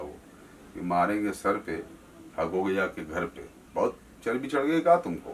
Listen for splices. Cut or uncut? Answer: uncut